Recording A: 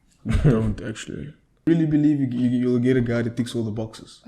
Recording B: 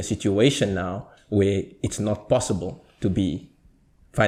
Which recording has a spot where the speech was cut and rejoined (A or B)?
A